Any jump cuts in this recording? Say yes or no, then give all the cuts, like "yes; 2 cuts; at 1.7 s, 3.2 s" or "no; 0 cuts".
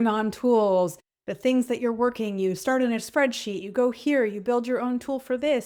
no; 0 cuts